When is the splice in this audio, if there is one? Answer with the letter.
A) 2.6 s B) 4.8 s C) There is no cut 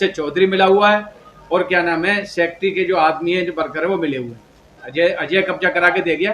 B